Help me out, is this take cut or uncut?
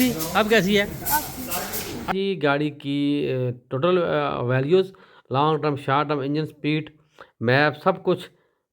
cut